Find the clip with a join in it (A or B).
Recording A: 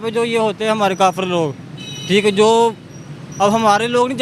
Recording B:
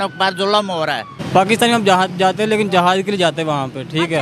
B